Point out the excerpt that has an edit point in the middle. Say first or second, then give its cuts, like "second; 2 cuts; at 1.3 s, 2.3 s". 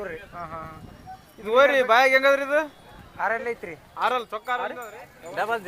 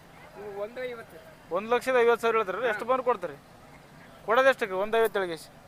first; 1 cut; at 4.8 s